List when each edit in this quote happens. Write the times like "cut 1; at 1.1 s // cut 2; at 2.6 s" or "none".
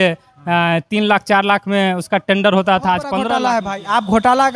cut 1; at 3.3 s